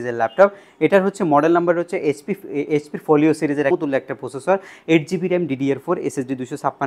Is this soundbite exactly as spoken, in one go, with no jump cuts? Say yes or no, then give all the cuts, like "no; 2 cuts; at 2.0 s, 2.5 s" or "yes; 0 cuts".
no; 1 cut; at 3.7 s